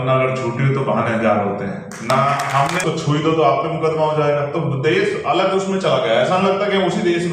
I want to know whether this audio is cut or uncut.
cut